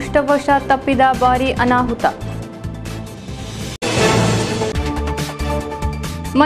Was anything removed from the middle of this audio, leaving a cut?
no; 0 cuts

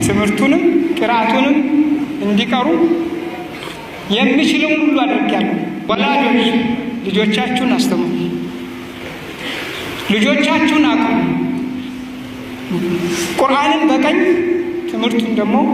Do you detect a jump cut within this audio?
yes; 1 cut; at 5.9 s

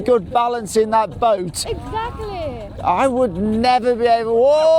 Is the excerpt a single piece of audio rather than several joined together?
yes; 0 cuts

